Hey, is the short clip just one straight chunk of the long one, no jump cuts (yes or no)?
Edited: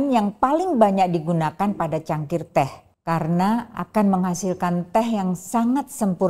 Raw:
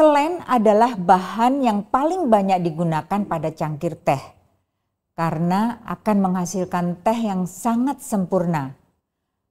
no